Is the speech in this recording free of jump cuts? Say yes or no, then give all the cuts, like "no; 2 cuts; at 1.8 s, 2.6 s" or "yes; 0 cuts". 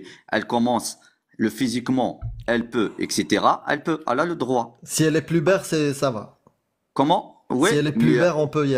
yes; 0 cuts